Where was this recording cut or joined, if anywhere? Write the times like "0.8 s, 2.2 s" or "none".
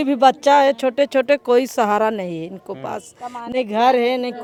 none